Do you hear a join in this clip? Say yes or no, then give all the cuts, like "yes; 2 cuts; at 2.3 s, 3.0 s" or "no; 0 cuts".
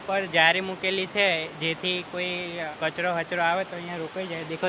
yes; 1 cut; at 2.7 s